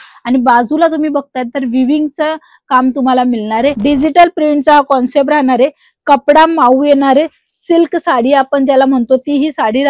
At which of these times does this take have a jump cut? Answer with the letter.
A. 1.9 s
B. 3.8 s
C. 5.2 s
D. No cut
B